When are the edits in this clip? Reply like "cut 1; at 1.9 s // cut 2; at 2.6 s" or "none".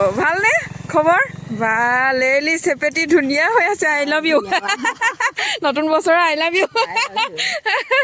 none